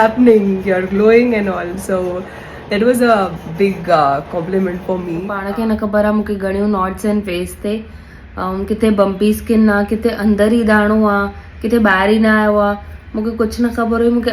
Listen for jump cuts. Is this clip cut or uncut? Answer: cut